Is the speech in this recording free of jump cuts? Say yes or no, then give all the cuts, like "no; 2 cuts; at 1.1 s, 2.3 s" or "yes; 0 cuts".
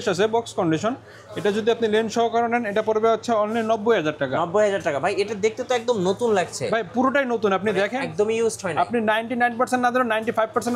yes; 0 cuts